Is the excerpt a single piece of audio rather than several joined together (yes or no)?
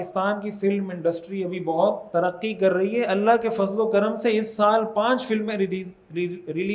no